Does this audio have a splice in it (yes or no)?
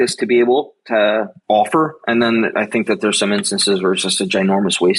yes